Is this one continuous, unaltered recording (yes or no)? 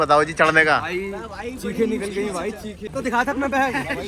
no